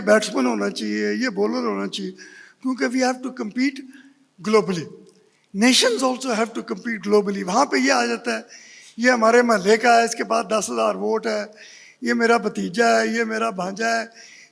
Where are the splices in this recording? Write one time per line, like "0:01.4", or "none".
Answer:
none